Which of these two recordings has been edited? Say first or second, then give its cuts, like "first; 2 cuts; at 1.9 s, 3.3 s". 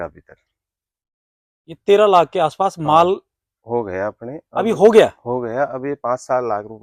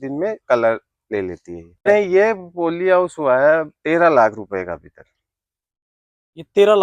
second; 1 cut; at 1.9 s